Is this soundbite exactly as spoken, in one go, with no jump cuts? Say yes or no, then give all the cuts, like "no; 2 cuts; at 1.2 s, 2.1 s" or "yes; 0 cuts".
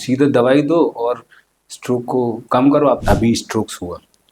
no; 1 cut; at 3.0 s